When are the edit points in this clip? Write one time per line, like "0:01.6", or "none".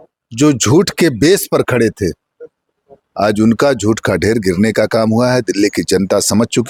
none